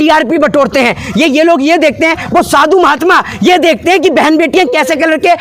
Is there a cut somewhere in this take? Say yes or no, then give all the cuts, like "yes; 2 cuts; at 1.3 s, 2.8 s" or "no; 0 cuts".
no; 0 cuts